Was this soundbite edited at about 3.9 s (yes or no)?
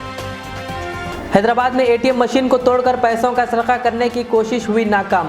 no